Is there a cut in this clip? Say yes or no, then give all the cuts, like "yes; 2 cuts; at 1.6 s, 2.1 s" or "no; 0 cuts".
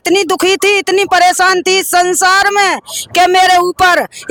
no; 0 cuts